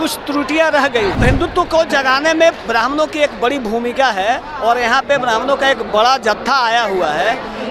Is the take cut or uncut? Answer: cut